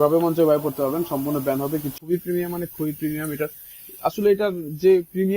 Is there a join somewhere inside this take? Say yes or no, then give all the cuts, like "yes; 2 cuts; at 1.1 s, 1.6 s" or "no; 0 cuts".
yes; 1 cut; at 1.9 s